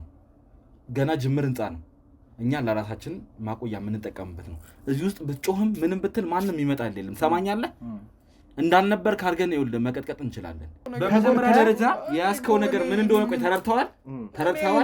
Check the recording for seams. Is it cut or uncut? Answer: cut